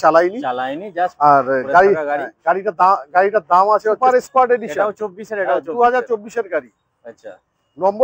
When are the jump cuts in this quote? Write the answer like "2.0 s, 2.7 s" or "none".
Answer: 4.0 s